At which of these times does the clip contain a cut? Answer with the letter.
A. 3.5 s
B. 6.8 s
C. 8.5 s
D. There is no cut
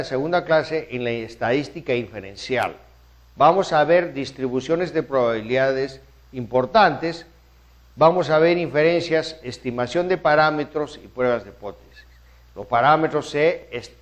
C